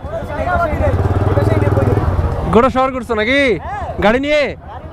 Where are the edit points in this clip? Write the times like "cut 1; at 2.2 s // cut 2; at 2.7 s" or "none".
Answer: none